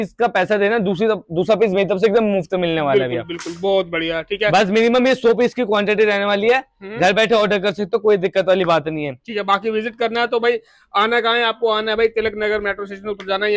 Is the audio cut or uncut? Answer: uncut